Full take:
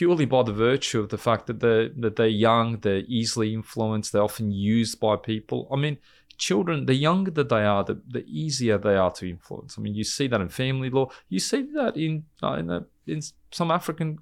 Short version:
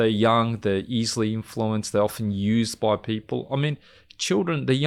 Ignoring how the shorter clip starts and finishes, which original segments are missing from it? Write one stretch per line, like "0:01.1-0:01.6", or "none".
none